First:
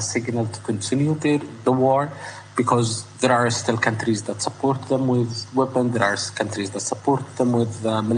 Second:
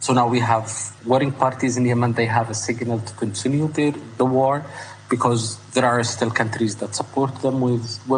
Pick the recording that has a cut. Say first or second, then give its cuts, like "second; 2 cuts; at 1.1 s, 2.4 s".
second; 1 cut; at 0.9 s